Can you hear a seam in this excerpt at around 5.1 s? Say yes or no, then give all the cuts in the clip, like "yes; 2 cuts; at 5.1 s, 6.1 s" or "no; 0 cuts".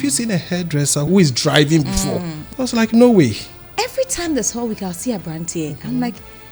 no; 3 cuts; at 1.1 s, 2.4 s, 3.7 s